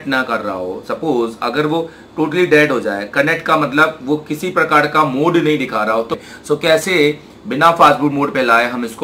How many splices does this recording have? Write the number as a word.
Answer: one